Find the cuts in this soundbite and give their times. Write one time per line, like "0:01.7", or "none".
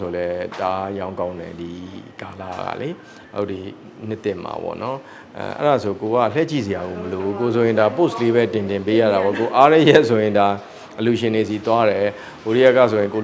none